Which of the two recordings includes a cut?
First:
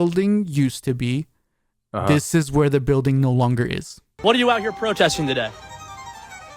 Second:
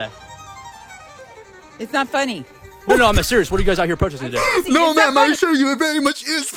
first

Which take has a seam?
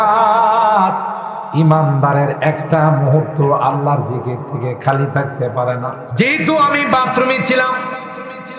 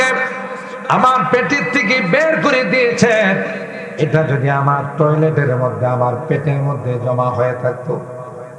first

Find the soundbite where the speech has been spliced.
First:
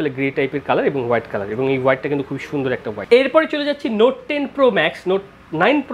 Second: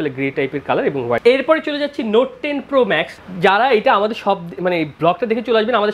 second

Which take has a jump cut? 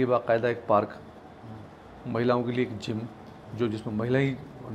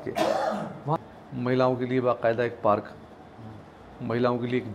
second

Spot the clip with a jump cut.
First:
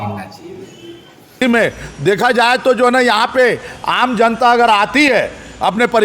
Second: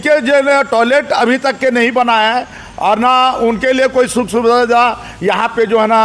first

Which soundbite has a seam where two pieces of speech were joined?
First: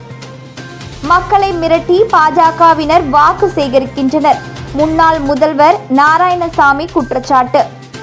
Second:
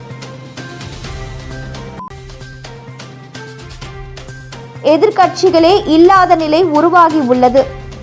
first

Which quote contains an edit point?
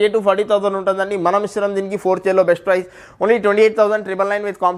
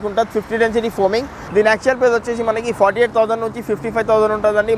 second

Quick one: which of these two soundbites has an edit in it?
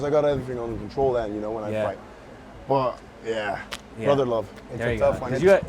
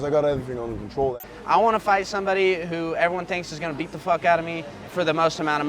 second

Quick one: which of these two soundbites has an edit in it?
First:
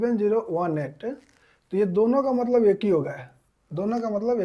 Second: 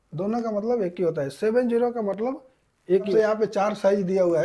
second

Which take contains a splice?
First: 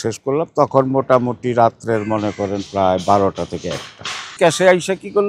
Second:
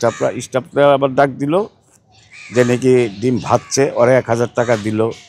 first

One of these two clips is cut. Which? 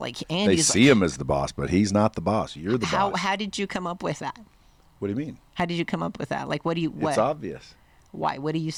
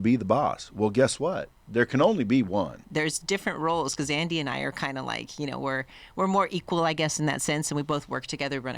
second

